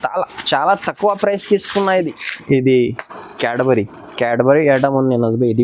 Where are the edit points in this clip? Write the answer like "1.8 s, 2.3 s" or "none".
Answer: 2.0 s